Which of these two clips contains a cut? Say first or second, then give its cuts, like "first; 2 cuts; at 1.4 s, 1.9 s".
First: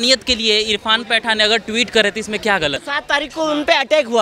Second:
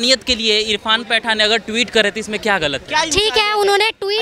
first; 1 cut; at 2.8 s